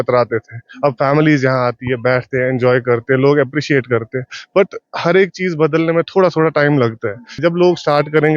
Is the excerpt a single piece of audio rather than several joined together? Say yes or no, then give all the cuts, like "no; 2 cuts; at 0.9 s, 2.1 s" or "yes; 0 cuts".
no; 1 cut; at 7.3 s